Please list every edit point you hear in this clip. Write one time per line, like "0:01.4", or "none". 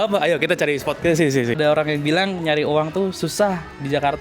0:01.6